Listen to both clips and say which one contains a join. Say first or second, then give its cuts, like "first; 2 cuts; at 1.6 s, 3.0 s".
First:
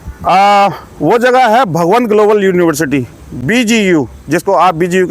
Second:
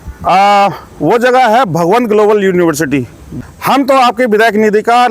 second; 1 cut; at 3.3 s